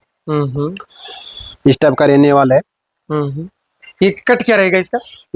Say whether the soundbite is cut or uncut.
uncut